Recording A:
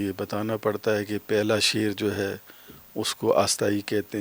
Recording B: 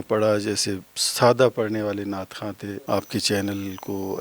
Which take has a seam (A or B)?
B